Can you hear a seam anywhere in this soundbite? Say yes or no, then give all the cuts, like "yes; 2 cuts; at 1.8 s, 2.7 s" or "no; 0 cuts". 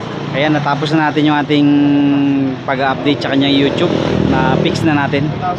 no; 0 cuts